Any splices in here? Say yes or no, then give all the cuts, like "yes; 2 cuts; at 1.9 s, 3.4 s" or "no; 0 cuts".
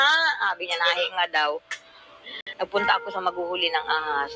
yes; 1 cut; at 2.3 s